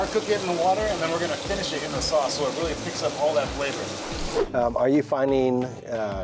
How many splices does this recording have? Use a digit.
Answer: 1